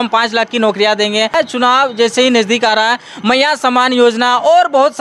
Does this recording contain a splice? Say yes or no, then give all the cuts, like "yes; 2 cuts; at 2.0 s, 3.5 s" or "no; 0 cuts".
yes; 1 cut; at 1.3 s